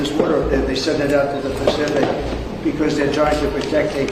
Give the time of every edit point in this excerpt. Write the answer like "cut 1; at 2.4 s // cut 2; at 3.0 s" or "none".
none